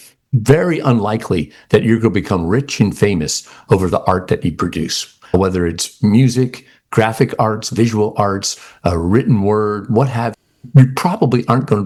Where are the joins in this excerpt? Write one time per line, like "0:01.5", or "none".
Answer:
none